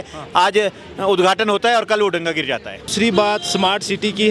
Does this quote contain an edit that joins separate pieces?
yes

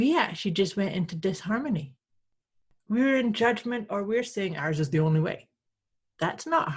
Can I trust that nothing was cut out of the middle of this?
no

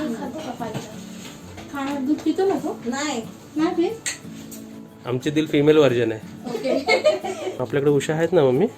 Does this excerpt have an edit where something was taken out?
yes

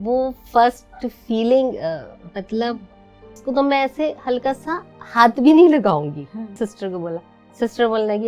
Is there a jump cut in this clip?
yes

